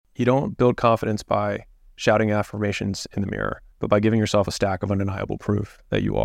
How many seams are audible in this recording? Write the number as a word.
one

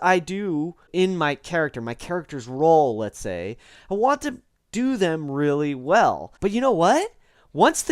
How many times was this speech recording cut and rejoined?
two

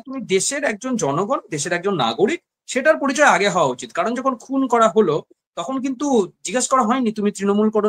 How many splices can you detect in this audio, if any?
zero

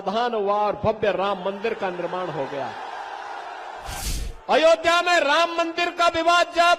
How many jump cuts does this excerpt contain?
one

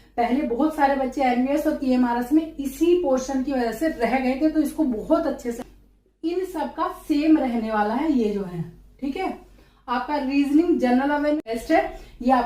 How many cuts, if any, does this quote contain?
two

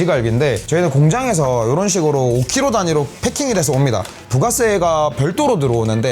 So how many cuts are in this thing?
one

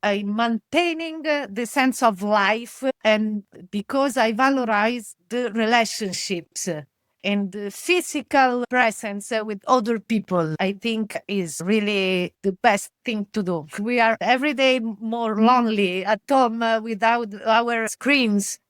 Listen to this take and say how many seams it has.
two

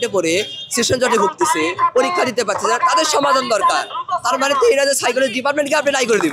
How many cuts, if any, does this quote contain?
zero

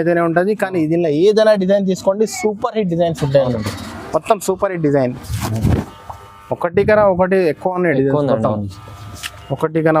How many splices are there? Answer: one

